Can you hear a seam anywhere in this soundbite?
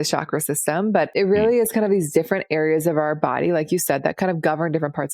yes; 1 cut; at 1.1 s

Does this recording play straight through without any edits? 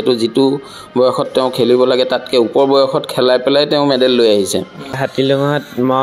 no; 1 cut; at 5.0 s

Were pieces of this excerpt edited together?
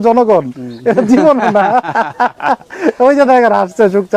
no; 0 cuts

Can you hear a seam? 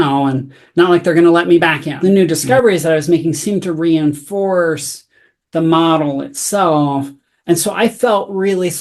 yes; 1 cut; at 1.9 s

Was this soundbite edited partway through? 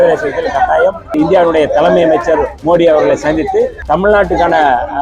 yes; 3 cuts; at 1.1 s, 2.5 s, 3.8 s

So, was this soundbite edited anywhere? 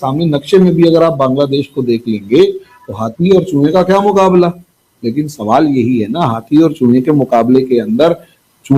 no; 0 cuts

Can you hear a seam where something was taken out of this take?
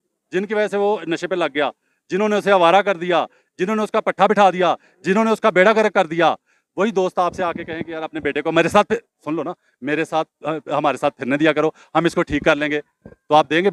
no; 0 cuts

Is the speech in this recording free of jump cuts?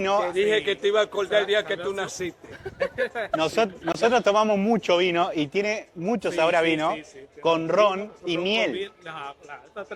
yes; 0 cuts

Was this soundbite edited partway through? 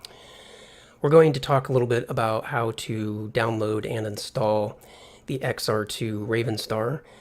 yes; 1 cut; at 1.7 s

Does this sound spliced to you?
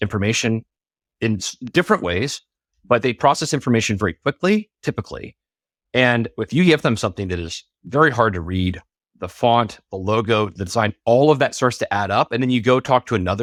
no; 0 cuts

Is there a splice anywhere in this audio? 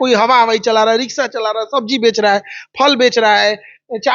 no; 0 cuts

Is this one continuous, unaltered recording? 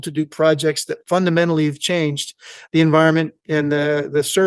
yes; 0 cuts

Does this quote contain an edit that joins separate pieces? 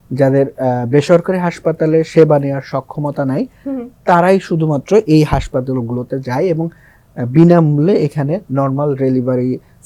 no; 0 cuts

